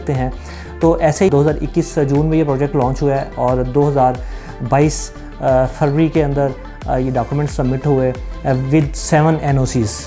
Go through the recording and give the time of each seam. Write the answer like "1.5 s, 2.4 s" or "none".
1.3 s